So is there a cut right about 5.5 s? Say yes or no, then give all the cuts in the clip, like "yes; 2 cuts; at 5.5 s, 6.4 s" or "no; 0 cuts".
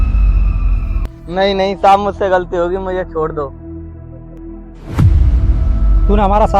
no; 1 cut; at 1.1 s